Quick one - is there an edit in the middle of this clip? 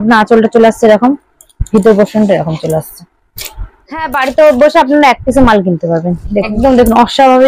yes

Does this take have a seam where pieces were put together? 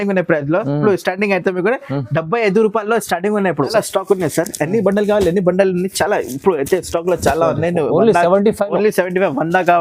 yes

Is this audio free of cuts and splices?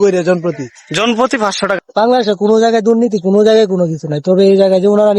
no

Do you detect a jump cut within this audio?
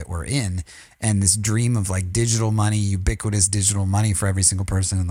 no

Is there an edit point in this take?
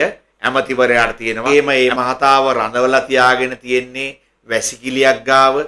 yes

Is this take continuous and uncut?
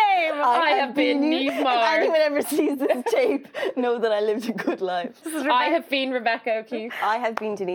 no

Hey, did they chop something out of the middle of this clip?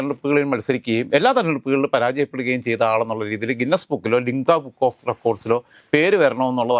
no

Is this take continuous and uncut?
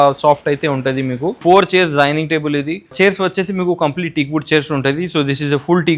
no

